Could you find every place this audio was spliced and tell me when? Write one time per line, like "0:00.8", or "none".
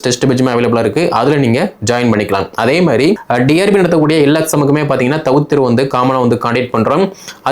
0:03.2